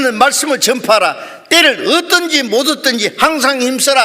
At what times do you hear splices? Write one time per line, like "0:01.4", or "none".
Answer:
none